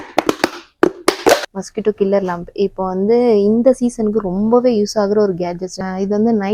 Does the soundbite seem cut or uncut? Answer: cut